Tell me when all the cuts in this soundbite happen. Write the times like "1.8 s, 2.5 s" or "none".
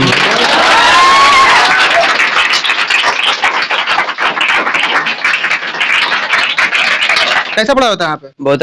7.4 s